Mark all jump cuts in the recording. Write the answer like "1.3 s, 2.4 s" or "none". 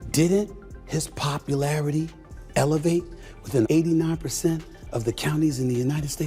none